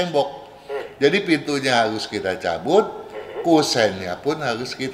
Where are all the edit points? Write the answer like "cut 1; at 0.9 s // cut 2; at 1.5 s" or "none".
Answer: none